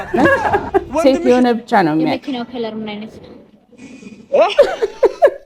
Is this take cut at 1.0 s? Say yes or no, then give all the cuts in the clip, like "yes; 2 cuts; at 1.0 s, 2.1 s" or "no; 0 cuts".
yes; 1 cut; at 1.0 s